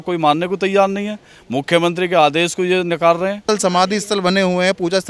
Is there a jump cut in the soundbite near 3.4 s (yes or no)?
yes